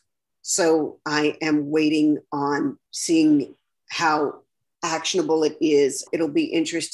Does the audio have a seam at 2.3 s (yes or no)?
no